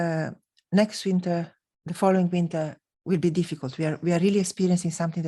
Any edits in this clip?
no; 0 cuts

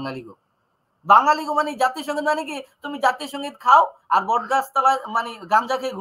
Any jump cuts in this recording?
no; 0 cuts

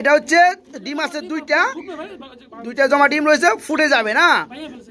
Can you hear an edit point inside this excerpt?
no; 0 cuts

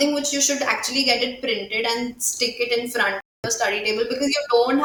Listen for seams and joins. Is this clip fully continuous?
yes; 0 cuts

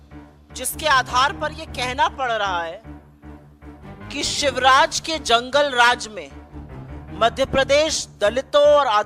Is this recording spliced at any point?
no; 0 cuts

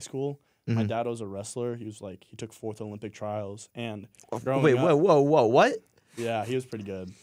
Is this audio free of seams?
yes; 0 cuts

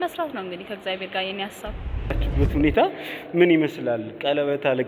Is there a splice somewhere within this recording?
yes; 1 cut; at 2.2 s

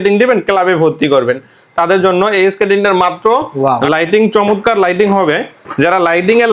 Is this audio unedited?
no; 1 cut; at 3.5 s

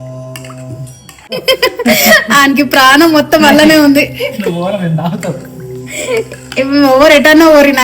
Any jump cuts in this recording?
yes; 1 cut; at 1.4 s

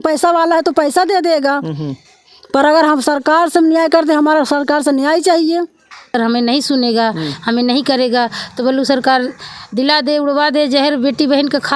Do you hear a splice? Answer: yes; 1 cut; at 6.1 s

